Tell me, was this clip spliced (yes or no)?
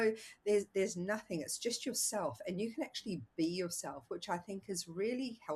no